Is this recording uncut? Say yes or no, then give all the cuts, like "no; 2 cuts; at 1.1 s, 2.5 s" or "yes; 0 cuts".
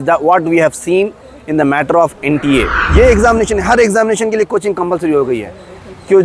no; 1 cut; at 2.8 s